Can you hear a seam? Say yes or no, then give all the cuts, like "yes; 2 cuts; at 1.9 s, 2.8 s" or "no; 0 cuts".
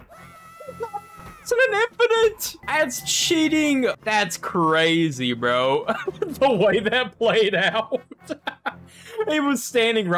yes; 2 cuts; at 2.5 s, 4.0 s